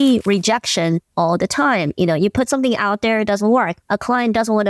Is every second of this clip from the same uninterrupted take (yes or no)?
yes